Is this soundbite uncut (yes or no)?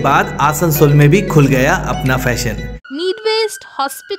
no